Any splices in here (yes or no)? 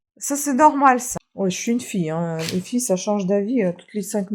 yes